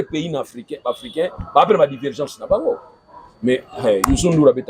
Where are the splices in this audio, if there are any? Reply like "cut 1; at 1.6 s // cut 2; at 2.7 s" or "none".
none